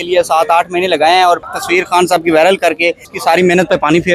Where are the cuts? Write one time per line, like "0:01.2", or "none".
0:01.5
0:03.1